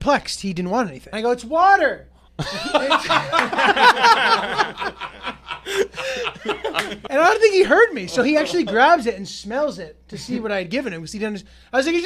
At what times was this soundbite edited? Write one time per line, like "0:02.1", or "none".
0:01.0
0:07.0